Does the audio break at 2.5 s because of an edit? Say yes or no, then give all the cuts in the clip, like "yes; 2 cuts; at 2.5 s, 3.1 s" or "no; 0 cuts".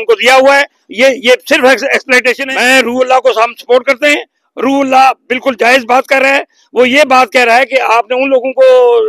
yes; 1 cut; at 2.5 s